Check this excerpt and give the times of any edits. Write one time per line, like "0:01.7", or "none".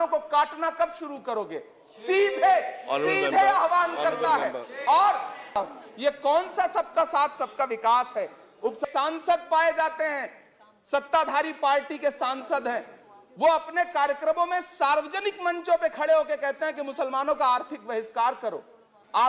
0:05.5
0:08.8